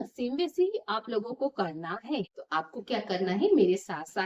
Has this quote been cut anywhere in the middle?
yes; 1 cut; at 2.4 s

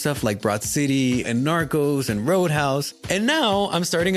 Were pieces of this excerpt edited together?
yes; 1 cut; at 2.9 s

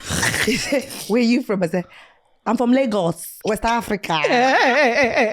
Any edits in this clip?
yes; 1 cut; at 3.3 s

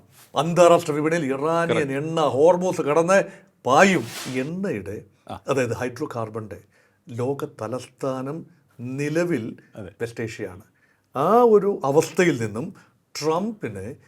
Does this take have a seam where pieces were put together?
yes; 1 cut; at 4.2 s

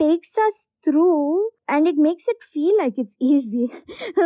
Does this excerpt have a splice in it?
no; 0 cuts

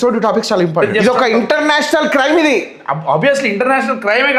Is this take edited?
no; 0 cuts

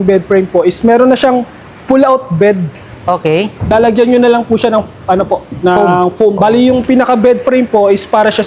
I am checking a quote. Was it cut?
yes; 2 cuts; at 3.7 s, 6.4 s

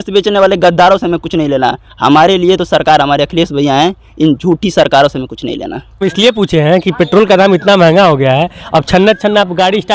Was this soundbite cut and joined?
yes; 1 cut; at 6.1 s

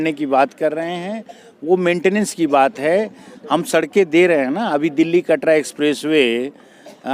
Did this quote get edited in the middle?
no; 0 cuts

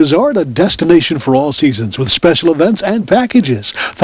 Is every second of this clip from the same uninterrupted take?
yes; 0 cuts

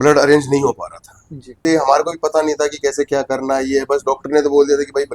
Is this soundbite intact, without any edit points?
no; 1 cut; at 1.6 s

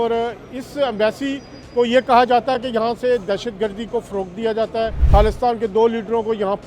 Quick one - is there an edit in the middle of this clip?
yes; 1 cut; at 5.0 s

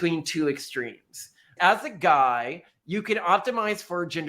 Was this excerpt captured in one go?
no; 1 cut; at 1.5 s

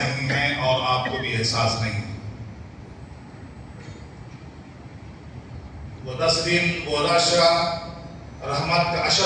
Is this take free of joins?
yes; 0 cuts

